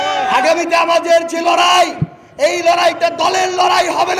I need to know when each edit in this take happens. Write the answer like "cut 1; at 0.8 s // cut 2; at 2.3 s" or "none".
none